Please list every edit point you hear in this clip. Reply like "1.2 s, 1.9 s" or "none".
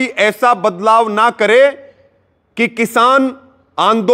none